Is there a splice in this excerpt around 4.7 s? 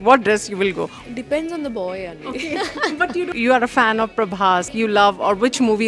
yes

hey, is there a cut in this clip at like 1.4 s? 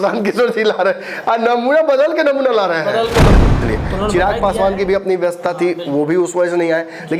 no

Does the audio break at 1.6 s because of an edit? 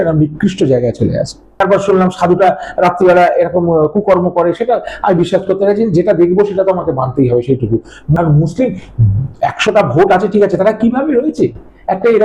yes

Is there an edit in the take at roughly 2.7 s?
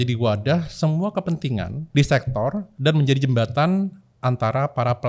yes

